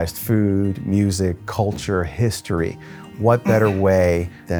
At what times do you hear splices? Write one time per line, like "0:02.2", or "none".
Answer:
none